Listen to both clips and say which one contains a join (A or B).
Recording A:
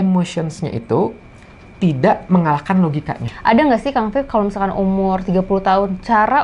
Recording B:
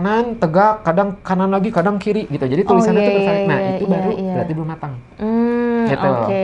A